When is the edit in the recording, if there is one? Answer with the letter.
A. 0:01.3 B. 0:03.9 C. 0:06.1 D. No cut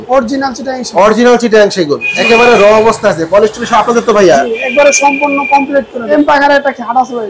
C